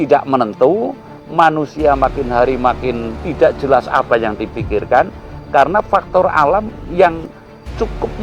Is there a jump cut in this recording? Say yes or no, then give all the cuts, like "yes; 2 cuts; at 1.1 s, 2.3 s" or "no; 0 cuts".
no; 0 cuts